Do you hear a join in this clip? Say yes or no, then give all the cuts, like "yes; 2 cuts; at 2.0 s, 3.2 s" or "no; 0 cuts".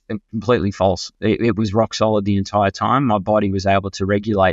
no; 0 cuts